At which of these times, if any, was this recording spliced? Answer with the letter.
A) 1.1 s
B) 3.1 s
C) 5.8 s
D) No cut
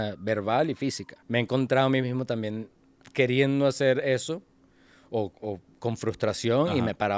A